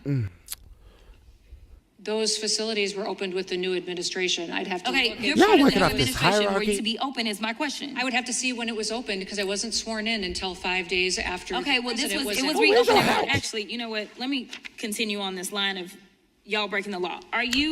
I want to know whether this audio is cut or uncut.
cut